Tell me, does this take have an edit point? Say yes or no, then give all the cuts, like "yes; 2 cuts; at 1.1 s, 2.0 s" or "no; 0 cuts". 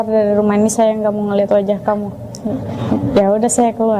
no; 0 cuts